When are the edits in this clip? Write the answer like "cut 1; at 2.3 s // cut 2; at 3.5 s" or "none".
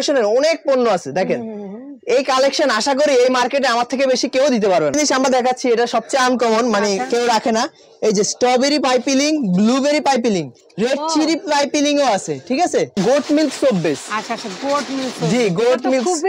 cut 1; at 4.9 s // cut 2; at 13.0 s